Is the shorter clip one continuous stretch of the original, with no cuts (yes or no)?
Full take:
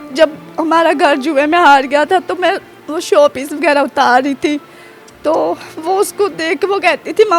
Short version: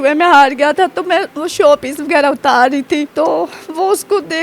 no